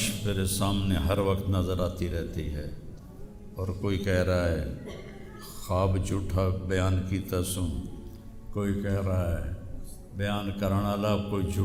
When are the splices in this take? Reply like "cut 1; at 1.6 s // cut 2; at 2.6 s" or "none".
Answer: none

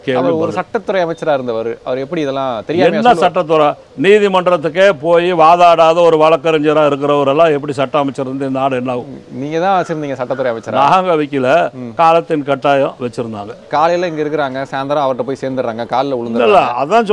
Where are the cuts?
cut 1; at 13.6 s

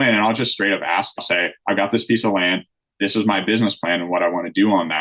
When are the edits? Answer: cut 1; at 1.2 s

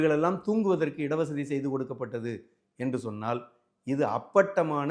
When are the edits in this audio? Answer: none

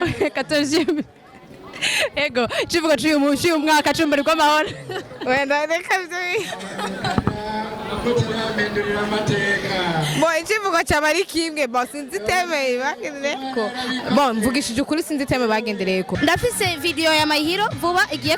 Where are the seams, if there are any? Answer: cut 1; at 16.2 s

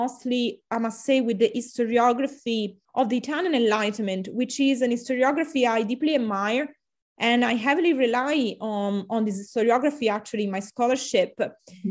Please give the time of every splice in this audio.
cut 1; at 2.8 s

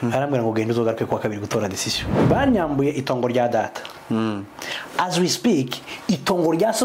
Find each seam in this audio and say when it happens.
cut 1; at 2.0 s

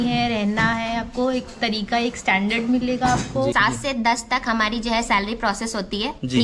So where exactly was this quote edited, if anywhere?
cut 1; at 3.5 s

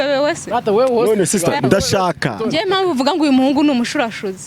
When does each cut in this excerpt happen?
cut 1; at 2.3 s

